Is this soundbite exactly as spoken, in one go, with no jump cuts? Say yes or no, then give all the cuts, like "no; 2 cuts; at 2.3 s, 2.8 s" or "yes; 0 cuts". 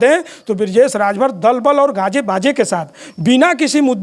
yes; 0 cuts